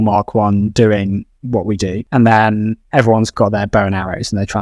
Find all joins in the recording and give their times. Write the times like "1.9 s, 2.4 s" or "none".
2.0 s, 3.3 s